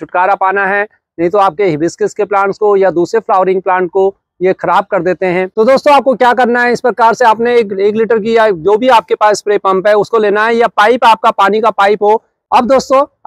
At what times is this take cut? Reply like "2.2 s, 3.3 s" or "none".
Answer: 5.6 s, 12.5 s